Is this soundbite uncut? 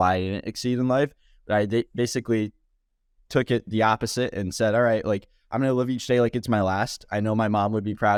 yes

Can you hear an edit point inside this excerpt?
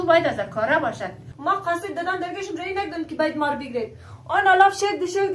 yes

